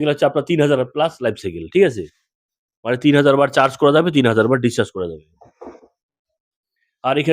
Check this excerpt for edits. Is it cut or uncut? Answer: uncut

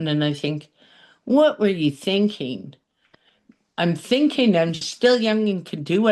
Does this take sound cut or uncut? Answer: uncut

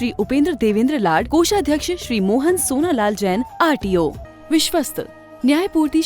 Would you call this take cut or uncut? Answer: cut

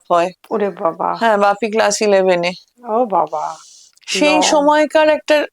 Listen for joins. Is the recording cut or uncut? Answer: uncut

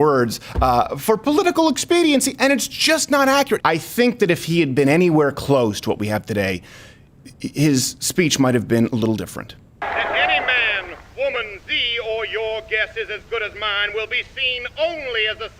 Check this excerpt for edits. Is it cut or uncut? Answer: cut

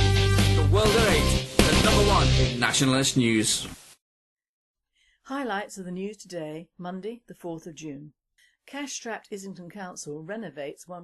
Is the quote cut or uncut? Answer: cut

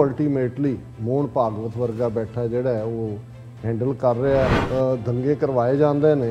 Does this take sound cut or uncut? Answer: cut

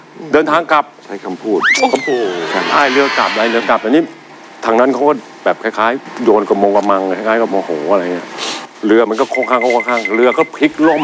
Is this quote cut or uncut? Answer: uncut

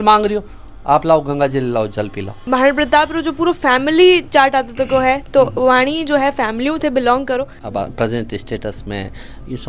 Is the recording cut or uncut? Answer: cut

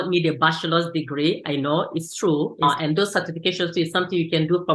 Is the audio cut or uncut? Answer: cut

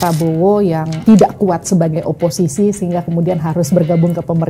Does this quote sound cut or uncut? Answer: cut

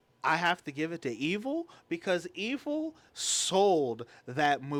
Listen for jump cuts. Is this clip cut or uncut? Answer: uncut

